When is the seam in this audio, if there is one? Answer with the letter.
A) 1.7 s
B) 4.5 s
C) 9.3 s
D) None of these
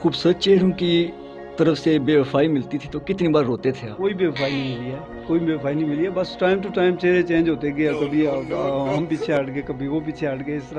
D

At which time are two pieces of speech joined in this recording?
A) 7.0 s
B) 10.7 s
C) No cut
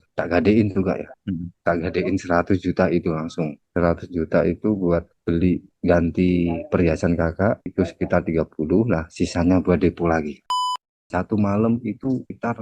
B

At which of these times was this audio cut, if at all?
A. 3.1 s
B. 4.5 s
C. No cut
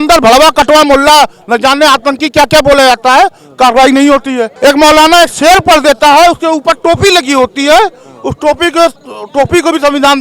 B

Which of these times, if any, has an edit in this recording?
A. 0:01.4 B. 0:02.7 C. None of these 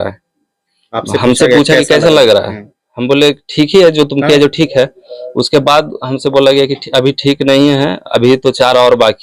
C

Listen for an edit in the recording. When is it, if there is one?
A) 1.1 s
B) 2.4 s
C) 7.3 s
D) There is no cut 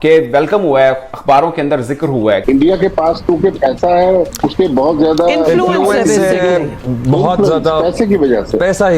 B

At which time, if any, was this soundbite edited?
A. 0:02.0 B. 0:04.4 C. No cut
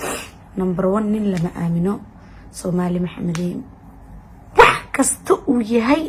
C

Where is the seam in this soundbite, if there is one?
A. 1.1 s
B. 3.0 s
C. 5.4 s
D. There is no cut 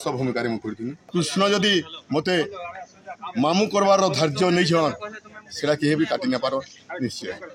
A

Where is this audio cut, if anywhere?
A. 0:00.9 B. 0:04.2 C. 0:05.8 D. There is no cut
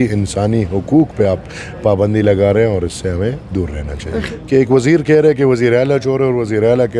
B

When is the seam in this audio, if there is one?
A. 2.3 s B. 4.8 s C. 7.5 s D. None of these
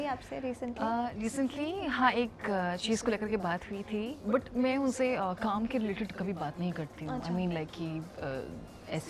D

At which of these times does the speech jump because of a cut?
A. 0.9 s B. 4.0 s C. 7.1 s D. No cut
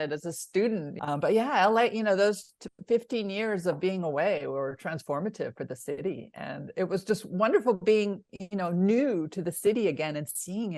A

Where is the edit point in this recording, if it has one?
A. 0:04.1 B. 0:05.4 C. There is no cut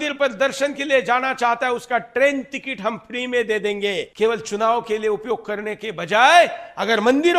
A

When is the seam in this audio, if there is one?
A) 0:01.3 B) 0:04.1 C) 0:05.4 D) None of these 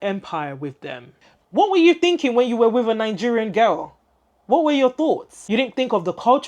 A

